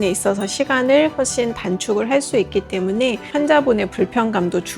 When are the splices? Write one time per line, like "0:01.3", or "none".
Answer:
0:03.3